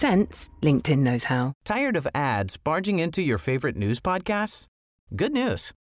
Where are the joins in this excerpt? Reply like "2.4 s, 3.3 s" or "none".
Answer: 1.6 s